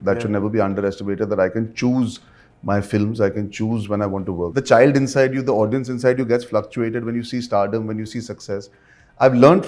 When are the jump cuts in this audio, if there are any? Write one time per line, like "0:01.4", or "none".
0:04.5